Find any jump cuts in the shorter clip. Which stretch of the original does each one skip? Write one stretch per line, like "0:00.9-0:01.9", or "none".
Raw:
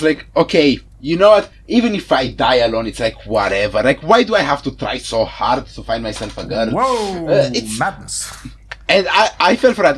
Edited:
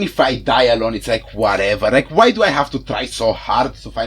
none